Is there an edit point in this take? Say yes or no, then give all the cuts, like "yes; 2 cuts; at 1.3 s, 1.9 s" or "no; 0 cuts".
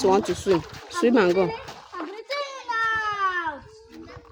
no; 0 cuts